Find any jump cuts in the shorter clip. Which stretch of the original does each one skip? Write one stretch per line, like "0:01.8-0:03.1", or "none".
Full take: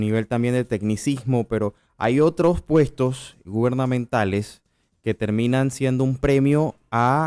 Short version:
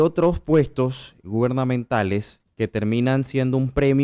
0:04.6-0:04.9